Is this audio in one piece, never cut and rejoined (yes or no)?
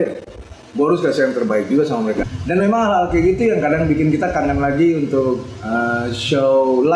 no